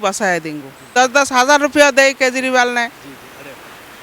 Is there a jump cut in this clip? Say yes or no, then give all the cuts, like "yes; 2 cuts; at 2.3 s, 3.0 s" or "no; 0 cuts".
yes; 1 cut; at 0.9 s